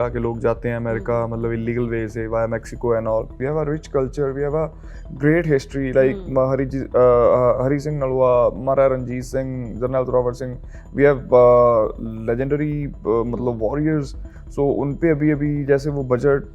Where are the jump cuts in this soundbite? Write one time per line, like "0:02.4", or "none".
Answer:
0:03.3